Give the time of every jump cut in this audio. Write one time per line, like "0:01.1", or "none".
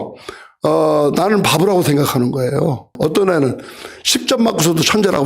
0:02.9